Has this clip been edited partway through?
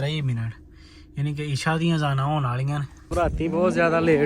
yes; 1 cut; at 3.1 s

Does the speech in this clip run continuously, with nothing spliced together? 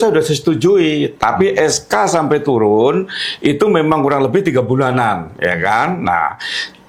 yes; 0 cuts

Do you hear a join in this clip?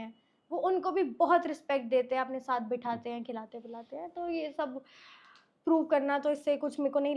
no; 0 cuts

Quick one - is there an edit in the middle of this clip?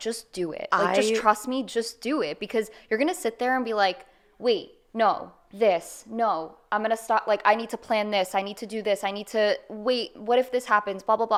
no; 0 cuts

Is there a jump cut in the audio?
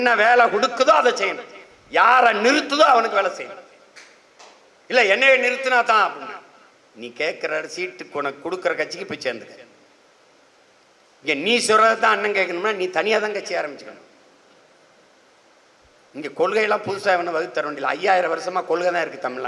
no; 0 cuts

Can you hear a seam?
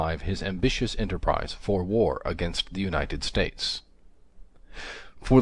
yes; 1 cut; at 2.5 s

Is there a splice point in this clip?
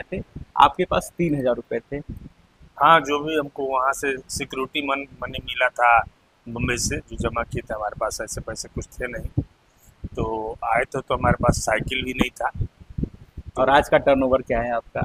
no; 0 cuts

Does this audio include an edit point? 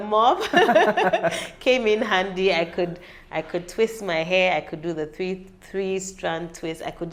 no; 0 cuts

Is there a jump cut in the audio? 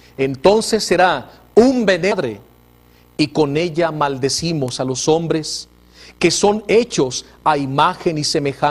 no; 0 cuts

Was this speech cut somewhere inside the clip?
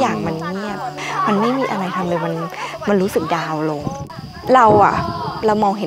yes; 2 cuts; at 0.9 s, 4.0 s

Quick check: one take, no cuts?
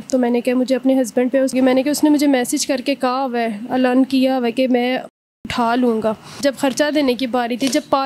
no; 2 cuts; at 1.5 s, 6.3 s

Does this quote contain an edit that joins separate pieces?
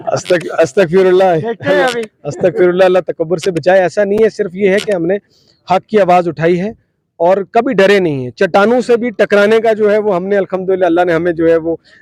no; 0 cuts

